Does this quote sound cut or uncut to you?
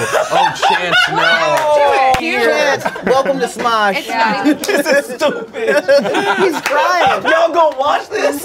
cut